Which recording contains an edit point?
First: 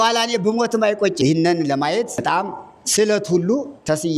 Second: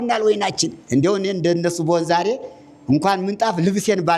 first; 2 cuts; at 1.2 s, 2.2 s

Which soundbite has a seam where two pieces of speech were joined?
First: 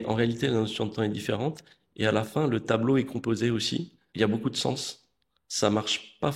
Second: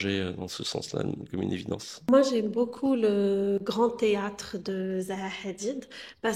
second; 1 cut; at 1.9 s

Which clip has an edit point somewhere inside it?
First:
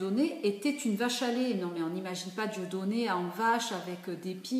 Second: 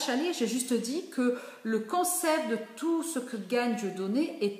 second; 1 cut; at 2.1 s

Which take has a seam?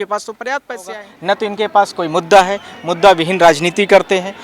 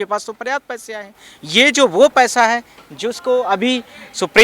first; 1 cut; at 1.1 s

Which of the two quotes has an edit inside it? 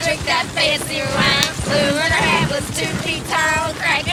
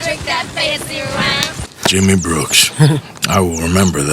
second; 1 cut; at 1.6 s

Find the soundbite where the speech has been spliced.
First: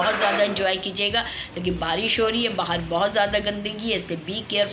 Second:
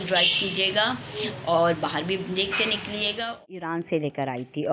second; 1 cut; at 3.3 s

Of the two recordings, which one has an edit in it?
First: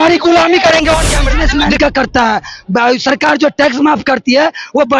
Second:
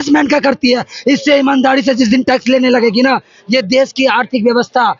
first; 1 cut; at 1.5 s

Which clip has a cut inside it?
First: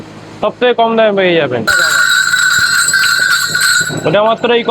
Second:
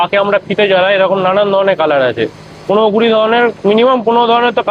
first; 1 cut; at 1.7 s

